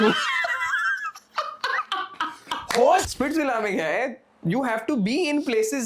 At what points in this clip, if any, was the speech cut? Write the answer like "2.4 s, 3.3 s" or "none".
3.1 s